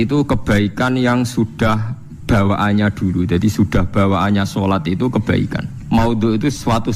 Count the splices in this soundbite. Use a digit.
1